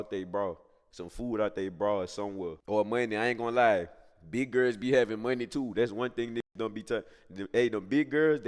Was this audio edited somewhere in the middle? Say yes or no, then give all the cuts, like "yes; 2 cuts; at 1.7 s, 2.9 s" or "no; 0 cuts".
yes; 1 cut; at 2.6 s